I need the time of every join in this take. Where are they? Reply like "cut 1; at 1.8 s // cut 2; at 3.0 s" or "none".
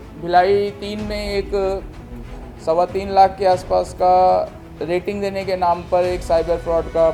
none